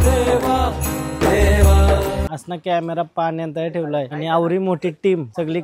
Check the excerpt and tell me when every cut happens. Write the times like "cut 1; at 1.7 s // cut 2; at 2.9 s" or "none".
cut 1; at 2.3 s